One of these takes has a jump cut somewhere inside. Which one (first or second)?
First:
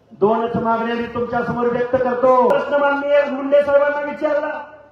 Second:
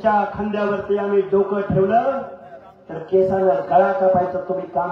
first